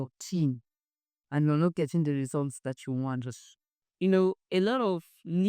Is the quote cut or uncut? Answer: cut